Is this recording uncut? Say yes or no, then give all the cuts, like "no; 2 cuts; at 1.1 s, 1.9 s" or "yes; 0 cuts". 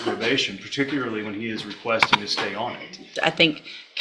no; 1 cut; at 3.1 s